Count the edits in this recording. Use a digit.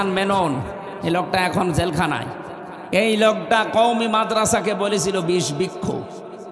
0